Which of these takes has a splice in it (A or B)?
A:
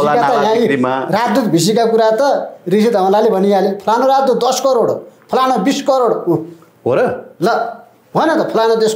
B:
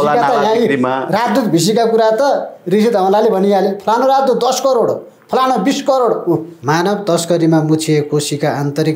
B